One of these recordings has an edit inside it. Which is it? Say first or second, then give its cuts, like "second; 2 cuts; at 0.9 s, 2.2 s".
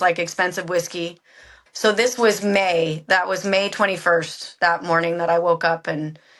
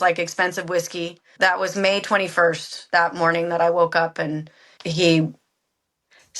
second; 1 cut; at 1.3 s